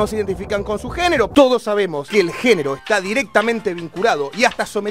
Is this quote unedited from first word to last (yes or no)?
no